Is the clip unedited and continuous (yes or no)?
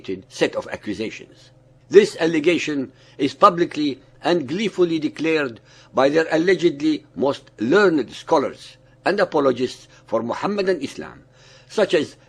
no